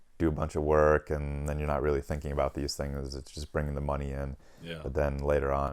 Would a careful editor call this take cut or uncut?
uncut